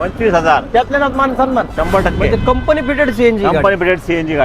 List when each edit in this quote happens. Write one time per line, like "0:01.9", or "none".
0:02.2